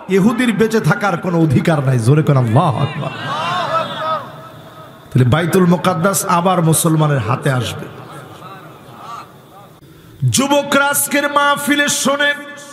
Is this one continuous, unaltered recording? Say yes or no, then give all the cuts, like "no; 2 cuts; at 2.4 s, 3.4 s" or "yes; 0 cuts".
no; 1 cut; at 9.8 s